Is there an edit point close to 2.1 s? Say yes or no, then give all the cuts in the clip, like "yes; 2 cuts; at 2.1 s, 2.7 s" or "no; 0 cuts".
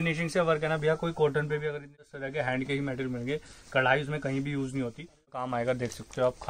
yes; 2 cuts; at 2.1 s, 5.4 s